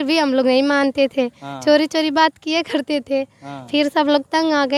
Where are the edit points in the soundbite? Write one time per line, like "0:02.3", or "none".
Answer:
none